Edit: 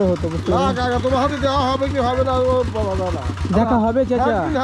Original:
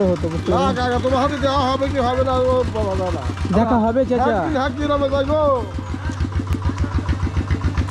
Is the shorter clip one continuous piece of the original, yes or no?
yes